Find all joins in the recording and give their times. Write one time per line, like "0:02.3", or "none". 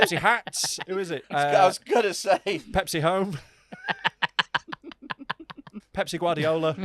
0:01.2
0:05.8